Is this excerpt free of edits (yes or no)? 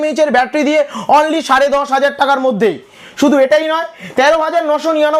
yes